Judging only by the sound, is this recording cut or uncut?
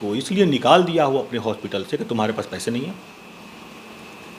uncut